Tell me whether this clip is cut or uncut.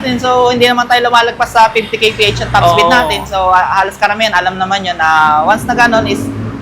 uncut